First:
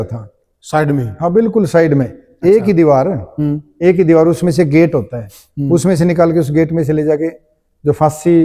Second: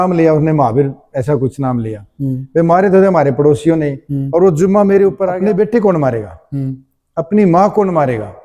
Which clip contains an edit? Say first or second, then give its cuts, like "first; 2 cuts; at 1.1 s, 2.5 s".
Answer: second; 1 cut; at 5.3 s